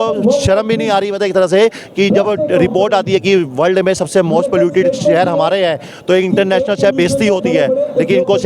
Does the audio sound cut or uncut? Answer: uncut